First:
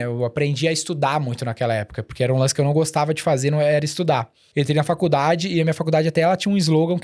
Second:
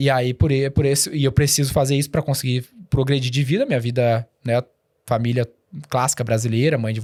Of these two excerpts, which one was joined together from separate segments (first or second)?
first